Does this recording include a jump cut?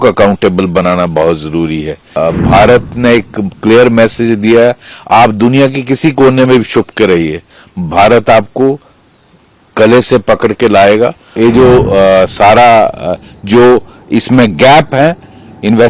yes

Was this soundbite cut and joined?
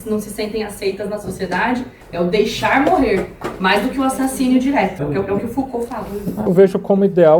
yes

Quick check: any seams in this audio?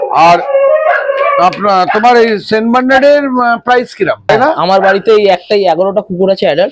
yes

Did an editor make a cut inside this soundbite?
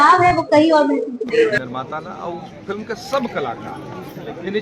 yes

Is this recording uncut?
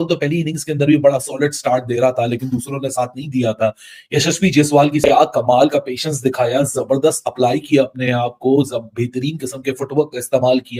yes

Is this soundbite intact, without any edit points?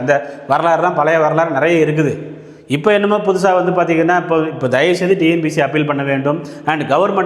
yes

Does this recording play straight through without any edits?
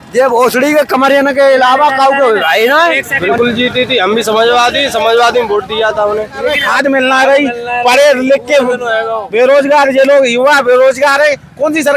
no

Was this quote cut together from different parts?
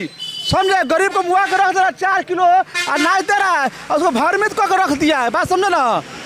no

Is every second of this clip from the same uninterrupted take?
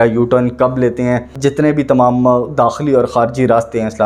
no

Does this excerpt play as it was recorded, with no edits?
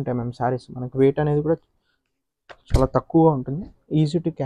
yes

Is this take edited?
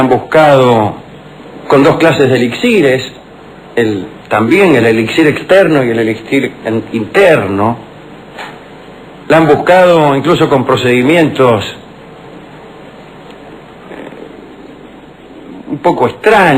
yes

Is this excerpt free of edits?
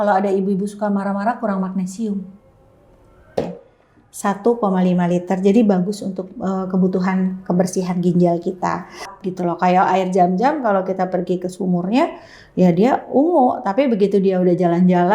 no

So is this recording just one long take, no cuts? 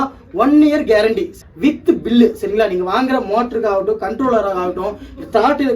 no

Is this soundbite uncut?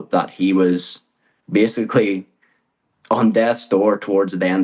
yes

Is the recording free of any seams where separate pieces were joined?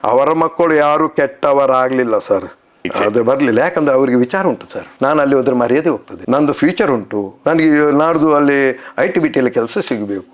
yes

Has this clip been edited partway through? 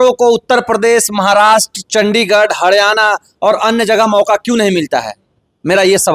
no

